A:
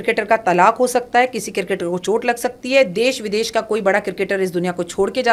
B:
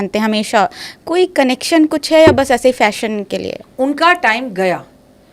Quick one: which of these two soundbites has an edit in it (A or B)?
B